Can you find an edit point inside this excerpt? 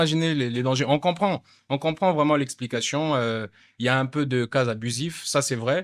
no; 0 cuts

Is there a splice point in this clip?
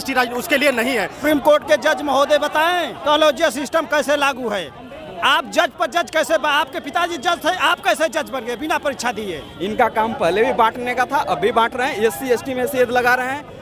yes; 3 cuts; at 1.2 s, 2.9 s, 9.5 s

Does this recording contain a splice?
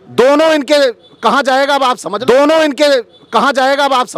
yes; 1 cut; at 2.1 s

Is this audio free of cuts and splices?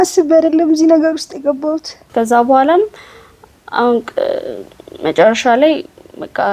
no; 1 cut; at 1.9 s

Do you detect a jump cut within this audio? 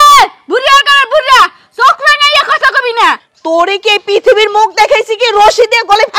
yes; 1 cut; at 3.3 s

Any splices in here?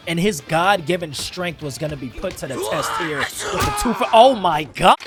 no; 0 cuts

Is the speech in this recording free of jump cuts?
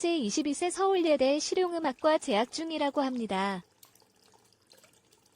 no; 1 cut; at 3.6 s

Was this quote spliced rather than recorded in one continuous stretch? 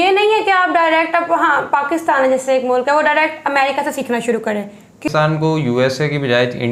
yes; 1 cut; at 5.1 s

